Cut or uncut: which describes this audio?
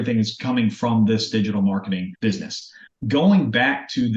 cut